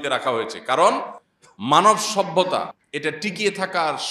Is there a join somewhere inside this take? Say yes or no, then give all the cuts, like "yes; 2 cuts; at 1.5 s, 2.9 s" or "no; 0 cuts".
yes; 2 cuts; at 1.8 s, 3.2 s